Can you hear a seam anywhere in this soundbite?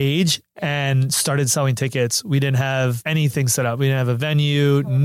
yes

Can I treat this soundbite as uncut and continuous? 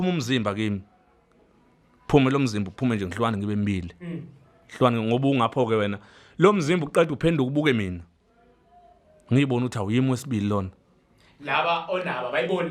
yes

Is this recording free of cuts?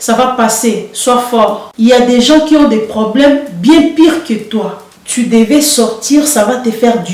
no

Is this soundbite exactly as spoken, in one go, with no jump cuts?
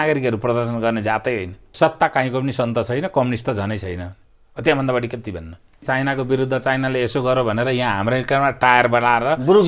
no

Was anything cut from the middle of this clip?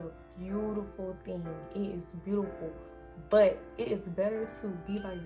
no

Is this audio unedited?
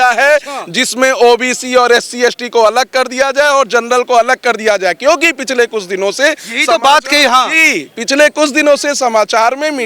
yes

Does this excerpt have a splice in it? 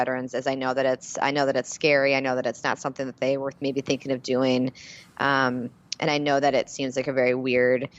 no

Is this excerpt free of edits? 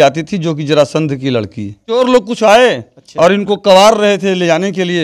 no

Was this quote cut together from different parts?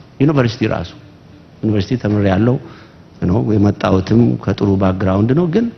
no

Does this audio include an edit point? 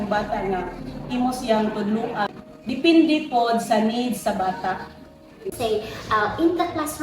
yes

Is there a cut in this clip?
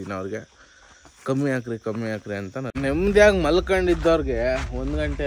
yes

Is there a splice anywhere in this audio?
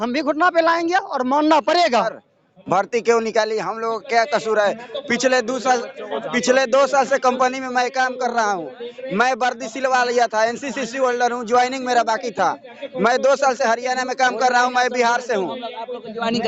no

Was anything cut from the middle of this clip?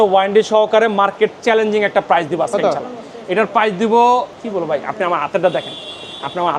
no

